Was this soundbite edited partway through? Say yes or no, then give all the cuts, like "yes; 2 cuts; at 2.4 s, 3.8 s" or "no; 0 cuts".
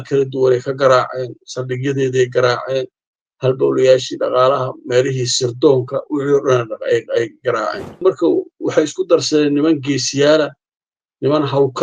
yes; 1 cut; at 8.0 s